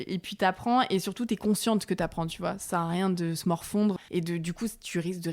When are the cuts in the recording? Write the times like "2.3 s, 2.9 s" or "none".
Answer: 4.0 s